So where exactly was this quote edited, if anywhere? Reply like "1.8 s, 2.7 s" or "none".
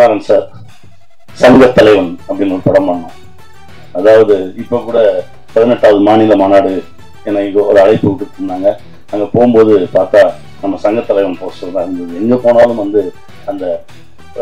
none